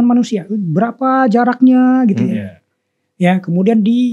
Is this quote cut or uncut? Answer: uncut